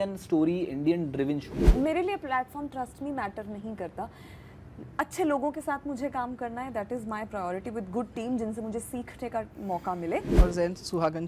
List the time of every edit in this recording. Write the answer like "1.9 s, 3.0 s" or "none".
1.6 s, 10.3 s